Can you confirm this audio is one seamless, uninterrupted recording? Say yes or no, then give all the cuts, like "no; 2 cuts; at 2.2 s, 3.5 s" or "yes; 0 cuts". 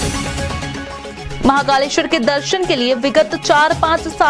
yes; 0 cuts